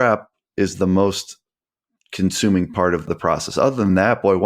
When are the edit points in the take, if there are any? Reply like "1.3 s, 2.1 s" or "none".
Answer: 3.1 s